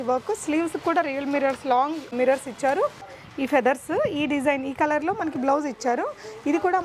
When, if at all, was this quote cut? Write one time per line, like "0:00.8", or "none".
0:02.1
0:03.1